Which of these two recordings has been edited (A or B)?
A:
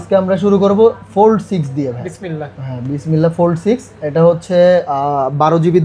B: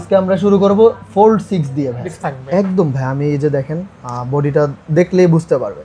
B